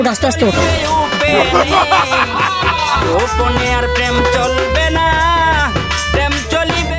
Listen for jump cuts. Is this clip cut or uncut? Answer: uncut